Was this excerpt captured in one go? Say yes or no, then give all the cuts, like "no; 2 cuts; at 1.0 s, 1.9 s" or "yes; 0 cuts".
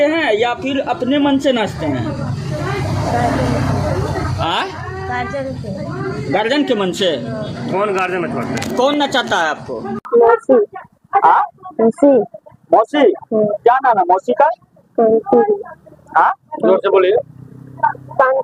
yes; 0 cuts